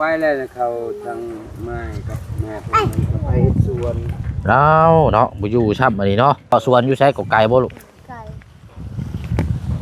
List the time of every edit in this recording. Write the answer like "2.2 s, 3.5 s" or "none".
6.5 s

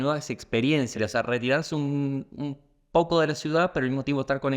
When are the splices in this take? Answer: 1.0 s

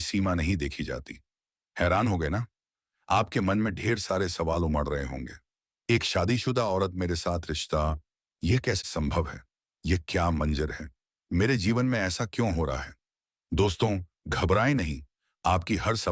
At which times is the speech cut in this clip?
8.8 s

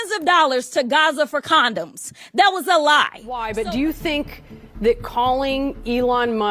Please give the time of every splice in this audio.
3.5 s

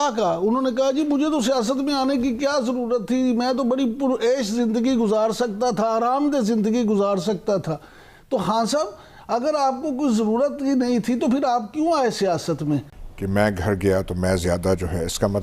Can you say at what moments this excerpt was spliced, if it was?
13.0 s

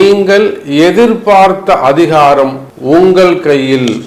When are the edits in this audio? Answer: 2.7 s

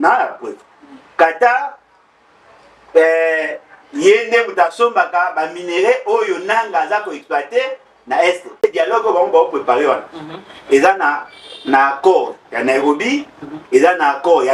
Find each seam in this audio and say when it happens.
8.6 s

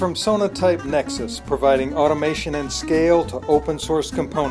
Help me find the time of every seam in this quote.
none

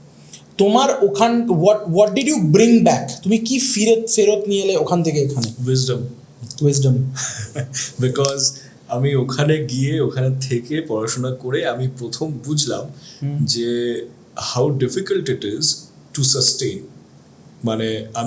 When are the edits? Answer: none

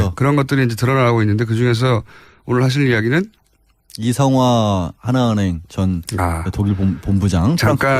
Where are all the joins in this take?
5.2 s

